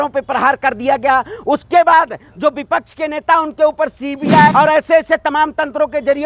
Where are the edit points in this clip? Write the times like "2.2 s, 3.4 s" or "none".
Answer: 4.5 s